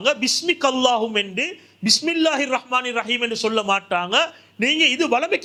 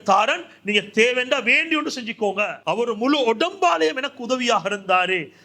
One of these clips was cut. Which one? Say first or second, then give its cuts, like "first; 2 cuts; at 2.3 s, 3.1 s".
second; 1 cut; at 2.6 s